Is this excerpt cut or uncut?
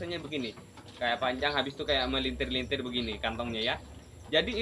uncut